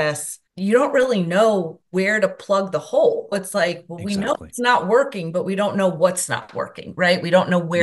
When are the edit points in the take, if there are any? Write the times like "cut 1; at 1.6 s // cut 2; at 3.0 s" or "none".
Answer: none